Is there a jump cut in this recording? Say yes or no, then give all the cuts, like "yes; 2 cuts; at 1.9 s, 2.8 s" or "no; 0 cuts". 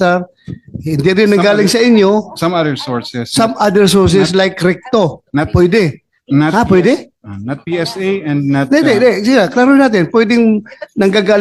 no; 0 cuts